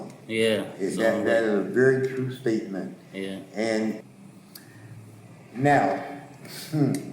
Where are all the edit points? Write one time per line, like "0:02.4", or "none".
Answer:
0:04.0